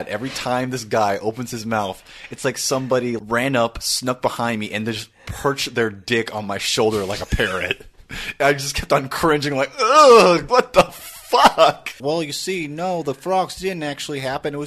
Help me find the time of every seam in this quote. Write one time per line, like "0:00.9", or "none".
0:03.2
0:10.4
0:12.0